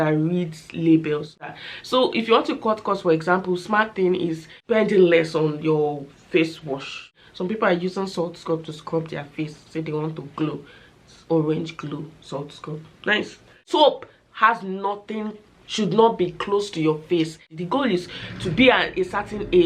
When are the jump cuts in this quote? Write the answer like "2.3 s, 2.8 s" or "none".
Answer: 1.4 s, 4.5 s, 7.2 s, 13.6 s, 17.5 s